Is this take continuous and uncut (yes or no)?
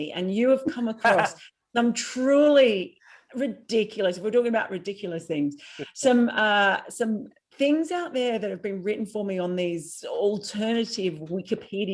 yes